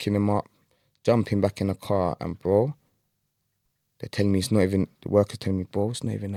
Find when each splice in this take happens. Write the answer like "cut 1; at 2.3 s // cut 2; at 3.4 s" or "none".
none